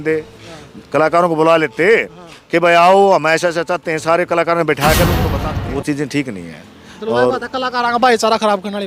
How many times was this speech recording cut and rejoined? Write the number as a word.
one